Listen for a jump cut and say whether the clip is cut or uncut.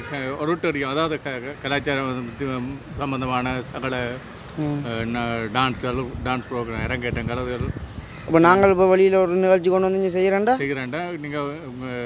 uncut